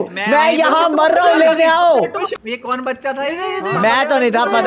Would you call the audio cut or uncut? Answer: cut